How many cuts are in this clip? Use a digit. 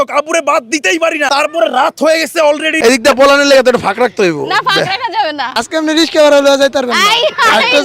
3